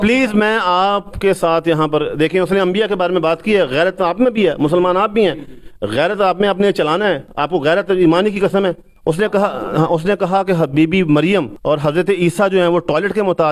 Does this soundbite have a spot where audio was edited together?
yes; 3 cuts; at 7.3 s, 8.9 s, 11.5 s

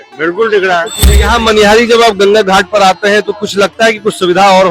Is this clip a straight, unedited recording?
no; 1 cut; at 1.0 s

